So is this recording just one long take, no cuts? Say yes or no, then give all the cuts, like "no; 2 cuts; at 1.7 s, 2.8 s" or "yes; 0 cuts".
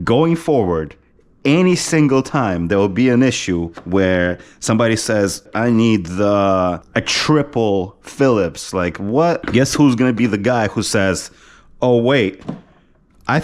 no; 3 cuts; at 5.5 s, 6.8 s, 9.4 s